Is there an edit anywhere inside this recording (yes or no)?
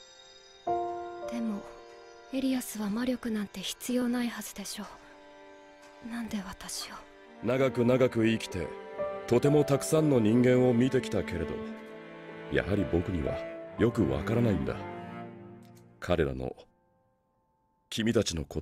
yes